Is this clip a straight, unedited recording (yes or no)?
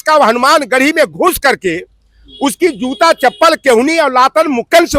yes